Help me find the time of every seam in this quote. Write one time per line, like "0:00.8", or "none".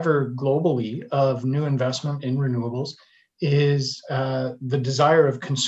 none